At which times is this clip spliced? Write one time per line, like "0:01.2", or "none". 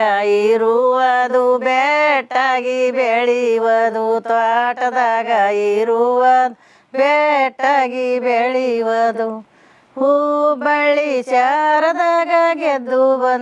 none